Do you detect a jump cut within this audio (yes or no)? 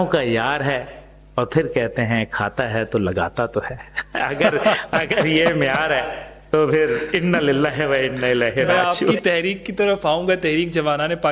no